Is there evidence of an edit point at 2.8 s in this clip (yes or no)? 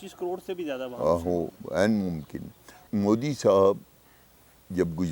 yes